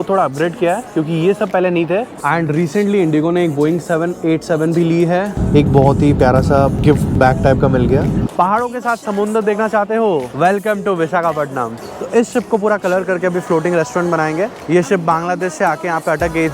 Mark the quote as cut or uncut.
cut